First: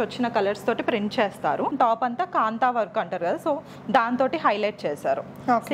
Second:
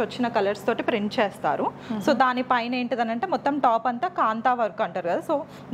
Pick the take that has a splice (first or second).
first